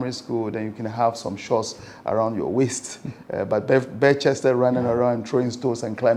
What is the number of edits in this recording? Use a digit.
0